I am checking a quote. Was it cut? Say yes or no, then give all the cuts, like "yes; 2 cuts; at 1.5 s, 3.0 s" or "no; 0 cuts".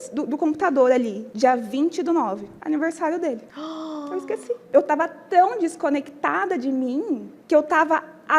yes; 5 cuts; at 1.2 s, 2.5 s, 3.5 s, 4.6 s, 7.3 s